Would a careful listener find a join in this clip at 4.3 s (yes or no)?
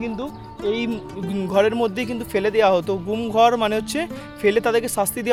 no